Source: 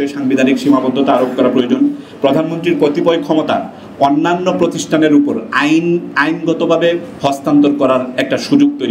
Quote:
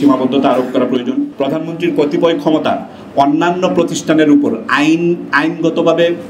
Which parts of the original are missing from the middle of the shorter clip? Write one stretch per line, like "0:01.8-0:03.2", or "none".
0:02.0-0:02.2

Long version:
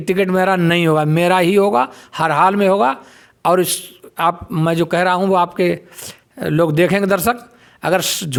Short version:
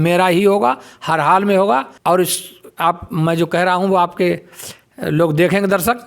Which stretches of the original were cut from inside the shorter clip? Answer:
0:03.0-0:03.3

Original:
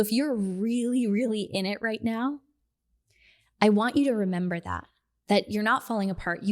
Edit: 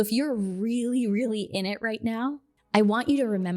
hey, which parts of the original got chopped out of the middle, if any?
0:02.5-0:03.4

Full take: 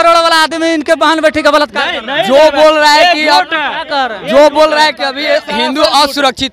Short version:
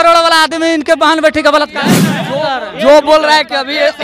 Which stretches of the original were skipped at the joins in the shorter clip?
0:02.1-0:03.6

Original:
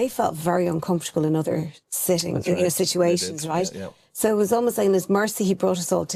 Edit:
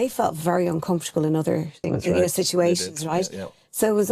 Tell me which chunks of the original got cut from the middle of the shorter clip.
0:01.8-0:02.2

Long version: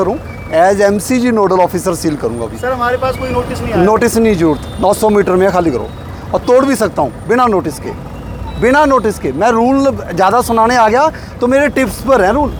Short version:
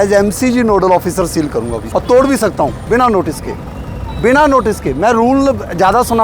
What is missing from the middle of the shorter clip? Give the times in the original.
0:02.5-0:06.2

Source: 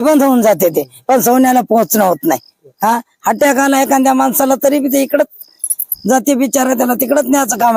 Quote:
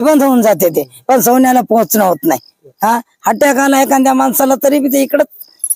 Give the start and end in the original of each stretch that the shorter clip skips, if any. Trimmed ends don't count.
none

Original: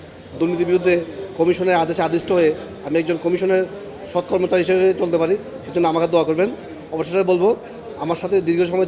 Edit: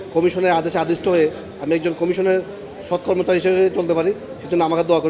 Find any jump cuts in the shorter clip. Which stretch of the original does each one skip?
none

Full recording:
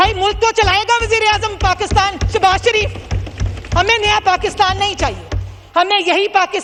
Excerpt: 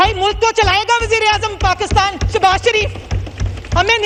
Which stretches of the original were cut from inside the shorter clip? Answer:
none

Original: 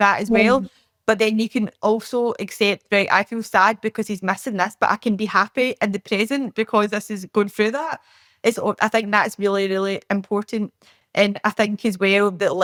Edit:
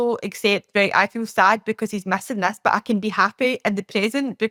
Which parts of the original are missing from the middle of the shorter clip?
none

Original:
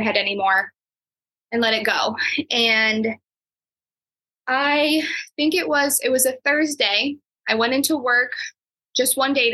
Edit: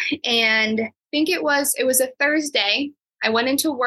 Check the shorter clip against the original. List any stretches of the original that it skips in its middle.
0:03.3-0:05.2

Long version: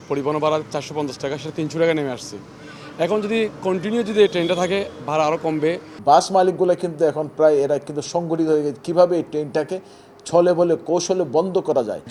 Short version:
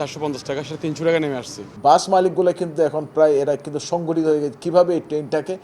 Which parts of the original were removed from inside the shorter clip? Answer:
0:02.4-0:05.9

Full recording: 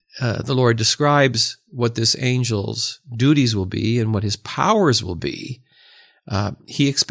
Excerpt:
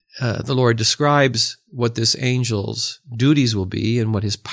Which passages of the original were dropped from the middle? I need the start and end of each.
none

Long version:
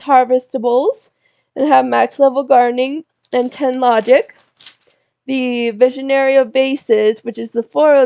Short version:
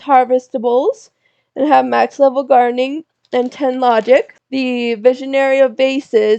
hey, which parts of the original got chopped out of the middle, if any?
0:04.4-0:05.1

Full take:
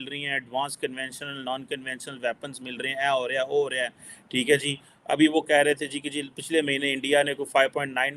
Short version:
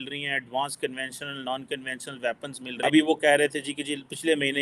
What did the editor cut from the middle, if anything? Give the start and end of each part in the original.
0:02.6-0:04.9

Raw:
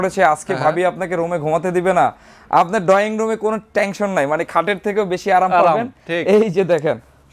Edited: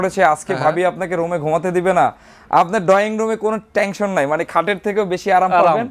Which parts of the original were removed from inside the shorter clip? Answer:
none

